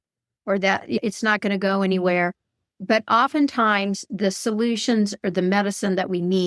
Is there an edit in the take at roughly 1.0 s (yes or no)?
yes